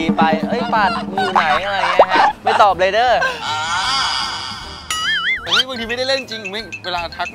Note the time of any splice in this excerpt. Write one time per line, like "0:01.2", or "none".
0:05.5